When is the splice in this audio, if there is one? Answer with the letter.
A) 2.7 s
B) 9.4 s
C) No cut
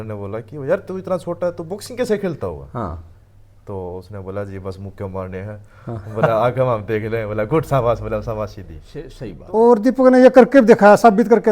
B